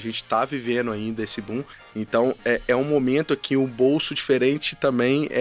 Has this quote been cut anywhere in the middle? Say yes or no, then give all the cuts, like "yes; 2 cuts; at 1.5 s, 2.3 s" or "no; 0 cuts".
yes; 1 cut; at 1.8 s